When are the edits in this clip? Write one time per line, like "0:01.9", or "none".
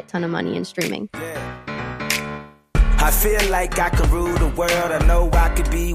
0:01.1